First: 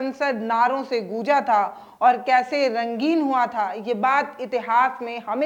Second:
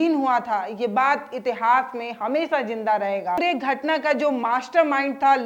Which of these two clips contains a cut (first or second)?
second